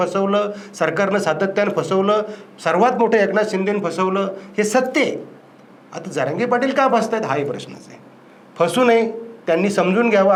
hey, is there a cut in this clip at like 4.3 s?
no; 0 cuts

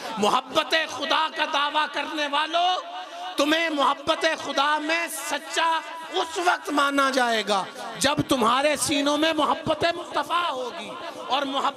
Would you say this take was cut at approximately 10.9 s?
no; 0 cuts

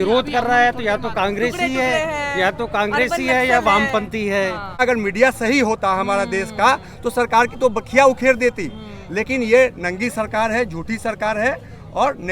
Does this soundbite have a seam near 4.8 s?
yes; 1 cut; at 4.8 s

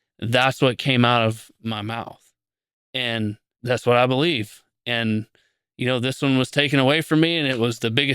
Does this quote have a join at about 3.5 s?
yes; 1 cut; at 3.5 s

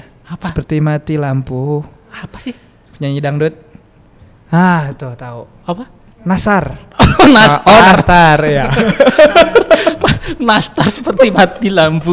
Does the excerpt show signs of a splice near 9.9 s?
no; 0 cuts

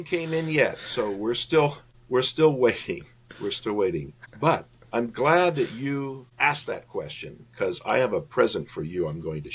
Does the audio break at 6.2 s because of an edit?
yes; 3 cuts; at 1.9 s, 4.2 s, 6.2 s

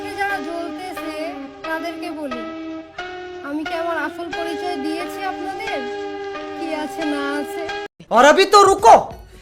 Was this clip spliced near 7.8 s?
yes; 1 cut; at 7.8 s

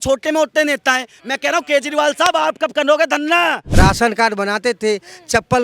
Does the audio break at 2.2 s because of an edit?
no; 1 cut; at 3.6 s

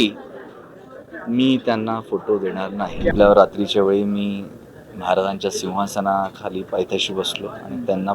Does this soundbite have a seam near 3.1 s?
yes; 1 cut; at 3.1 s

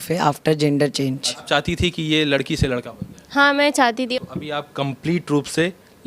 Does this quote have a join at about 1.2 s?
yes; 2 cuts; at 1.2 s, 4.1 s

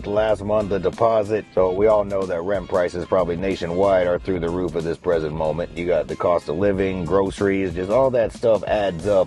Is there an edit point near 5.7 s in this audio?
yes; 2 cuts; at 1.5 s, 5.7 s

